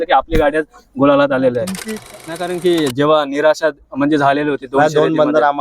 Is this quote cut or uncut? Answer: cut